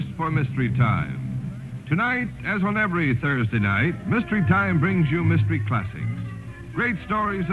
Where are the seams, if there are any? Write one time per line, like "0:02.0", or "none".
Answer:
0:01.3